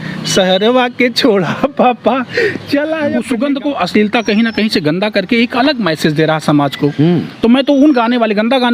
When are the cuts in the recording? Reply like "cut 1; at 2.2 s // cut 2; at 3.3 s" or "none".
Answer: cut 1; at 3.1 s